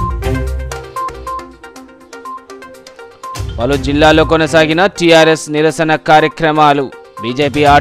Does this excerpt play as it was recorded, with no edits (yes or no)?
no